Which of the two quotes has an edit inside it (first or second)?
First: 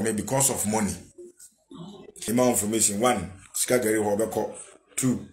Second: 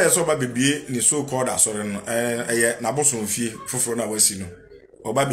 first